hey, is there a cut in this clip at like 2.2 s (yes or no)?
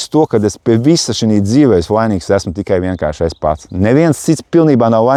no